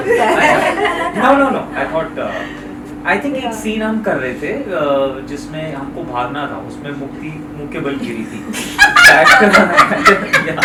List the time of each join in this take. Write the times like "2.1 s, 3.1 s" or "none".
none